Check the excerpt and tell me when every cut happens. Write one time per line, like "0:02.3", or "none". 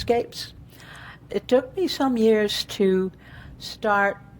0:01.2